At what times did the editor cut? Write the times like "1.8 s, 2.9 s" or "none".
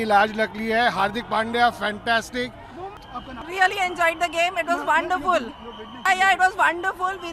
3.0 s